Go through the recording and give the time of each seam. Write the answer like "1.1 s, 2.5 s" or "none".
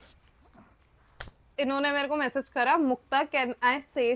1.5 s

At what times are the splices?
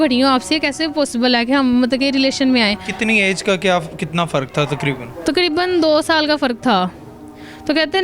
none

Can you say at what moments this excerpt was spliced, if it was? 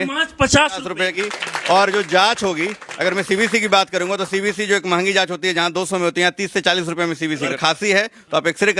1.1 s, 7.6 s

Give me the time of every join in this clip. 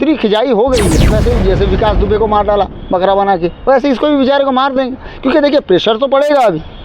0.9 s

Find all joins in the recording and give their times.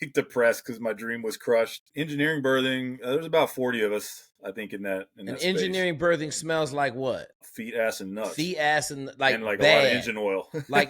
1.8 s

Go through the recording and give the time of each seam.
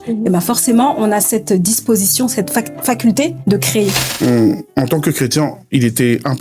3.7 s

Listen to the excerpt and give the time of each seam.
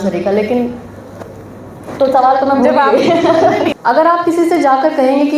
3.8 s

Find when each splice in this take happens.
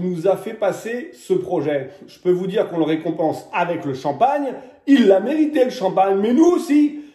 none

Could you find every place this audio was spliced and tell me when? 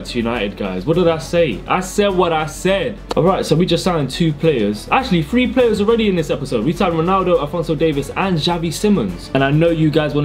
3.1 s, 9.3 s

